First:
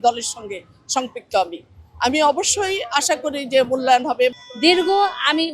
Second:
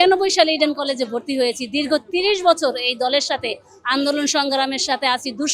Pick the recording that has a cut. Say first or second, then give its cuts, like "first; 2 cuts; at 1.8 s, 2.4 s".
first; 1 cut; at 4.4 s